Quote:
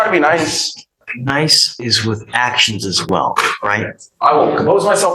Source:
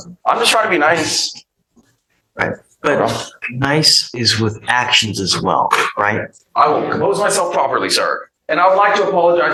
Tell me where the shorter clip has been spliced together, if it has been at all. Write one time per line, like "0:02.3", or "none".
0:01.0